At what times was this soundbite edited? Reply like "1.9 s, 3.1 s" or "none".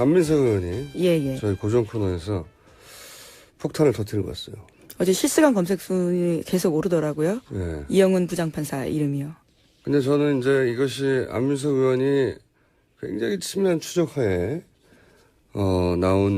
none